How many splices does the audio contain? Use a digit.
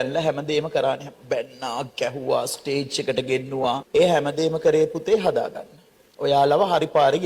0